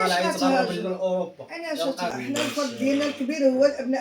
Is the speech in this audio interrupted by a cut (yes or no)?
yes